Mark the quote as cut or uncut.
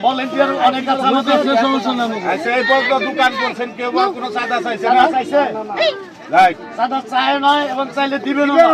uncut